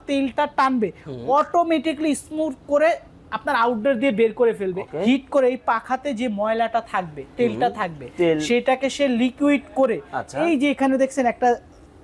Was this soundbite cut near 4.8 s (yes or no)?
yes